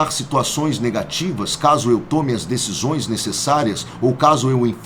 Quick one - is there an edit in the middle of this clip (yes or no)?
no